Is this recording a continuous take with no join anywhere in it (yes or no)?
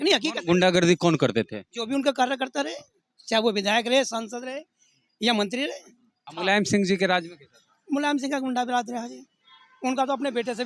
no